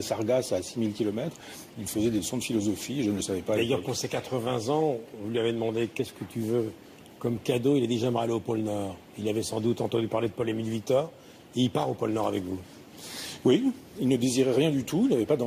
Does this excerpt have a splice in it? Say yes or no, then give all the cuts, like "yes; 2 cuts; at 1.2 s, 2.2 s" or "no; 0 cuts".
no; 0 cuts